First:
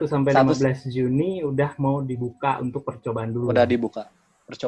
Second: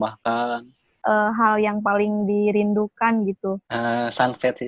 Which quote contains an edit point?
second; 2 cuts; at 1.0 s, 3.7 s

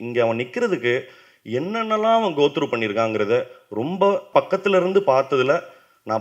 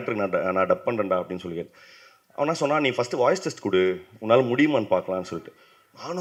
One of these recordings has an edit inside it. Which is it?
first; 1 cut; at 4.3 s

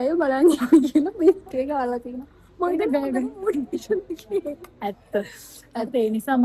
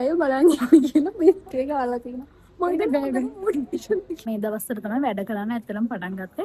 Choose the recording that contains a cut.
second; 1 cut; at 4.3 s

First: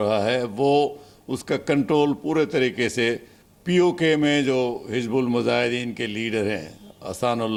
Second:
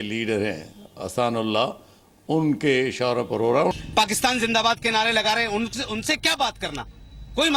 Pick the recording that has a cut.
second; 1 cut; at 3.7 s

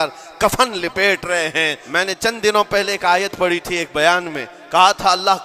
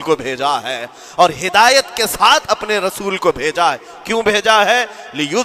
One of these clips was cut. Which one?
first; 1 cut; at 1.8 s

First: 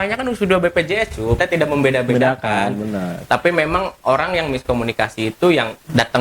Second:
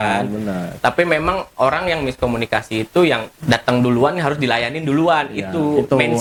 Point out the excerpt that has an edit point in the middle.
first; 1 cut; at 1.4 s

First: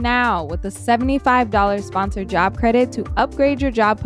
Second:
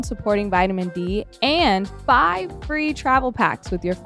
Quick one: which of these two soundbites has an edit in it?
second; 1 cut; at 1.9 s

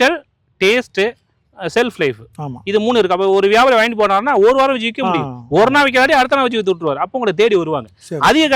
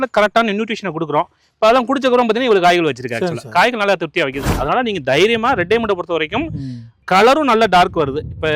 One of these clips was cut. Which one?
second; 2 cuts; at 4.4 s, 7.0 s

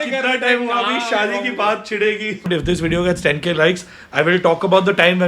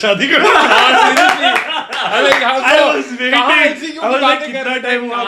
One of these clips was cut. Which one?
first; 1 cut; at 2.5 s

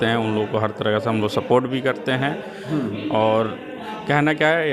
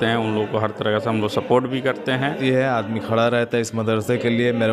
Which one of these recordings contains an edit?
second; 1 cut; at 2.4 s

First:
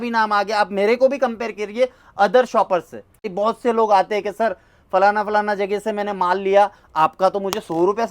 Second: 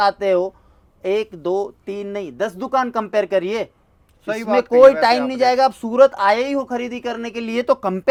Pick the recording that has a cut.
first; 1 cut; at 3.3 s

